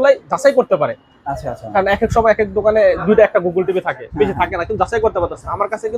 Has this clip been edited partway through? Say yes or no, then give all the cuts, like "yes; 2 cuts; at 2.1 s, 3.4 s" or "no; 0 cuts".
no; 0 cuts